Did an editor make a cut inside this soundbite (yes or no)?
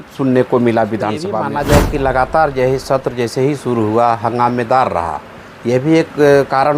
yes